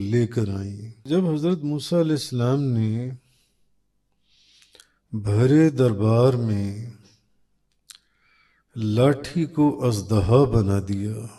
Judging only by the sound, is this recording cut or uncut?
uncut